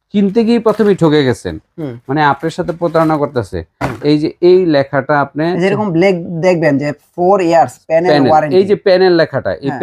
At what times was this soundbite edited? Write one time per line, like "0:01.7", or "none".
none

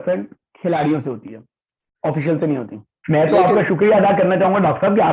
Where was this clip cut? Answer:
0:03.0

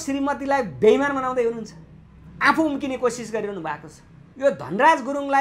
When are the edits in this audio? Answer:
0:04.2

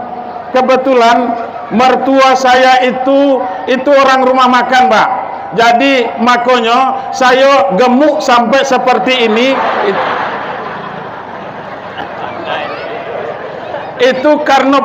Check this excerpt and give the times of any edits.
none

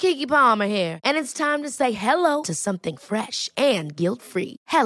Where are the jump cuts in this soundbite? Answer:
none

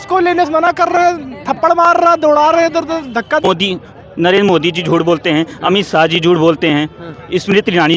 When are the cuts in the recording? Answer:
0:03.4

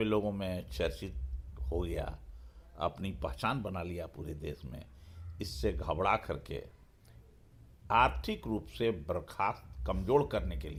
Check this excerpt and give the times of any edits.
none

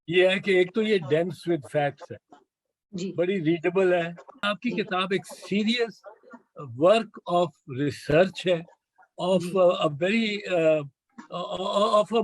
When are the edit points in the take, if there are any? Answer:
0:04.4

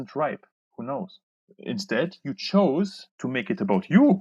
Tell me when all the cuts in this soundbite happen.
0:01.5
0:03.1

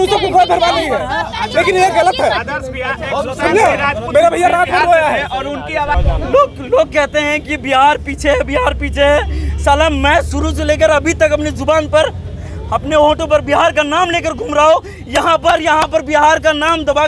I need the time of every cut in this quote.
0:05.9

